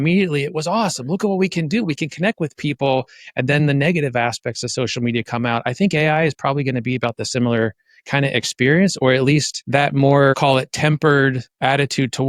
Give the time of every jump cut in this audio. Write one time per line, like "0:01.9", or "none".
0:09.6
0:10.4